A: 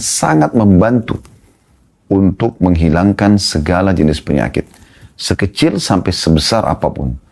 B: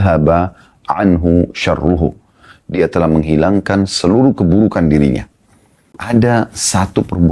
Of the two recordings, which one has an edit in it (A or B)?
B